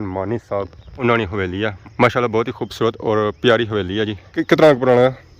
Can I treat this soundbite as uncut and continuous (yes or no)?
no